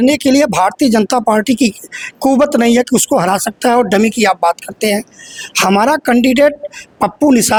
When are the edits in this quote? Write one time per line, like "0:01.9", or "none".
none